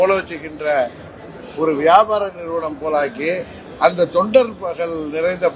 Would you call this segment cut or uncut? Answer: cut